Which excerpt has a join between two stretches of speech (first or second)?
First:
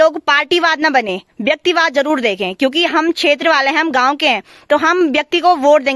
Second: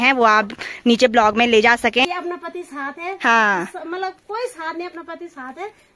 second